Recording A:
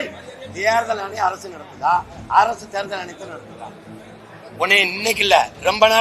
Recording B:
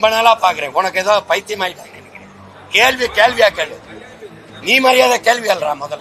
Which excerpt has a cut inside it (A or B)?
A